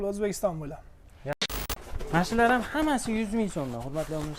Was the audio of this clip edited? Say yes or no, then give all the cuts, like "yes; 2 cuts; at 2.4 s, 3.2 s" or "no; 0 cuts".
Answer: yes; 1 cut; at 1.3 s